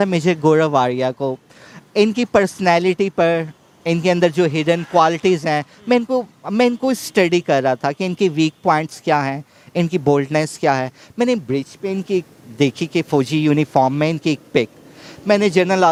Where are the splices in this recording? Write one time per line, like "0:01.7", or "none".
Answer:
none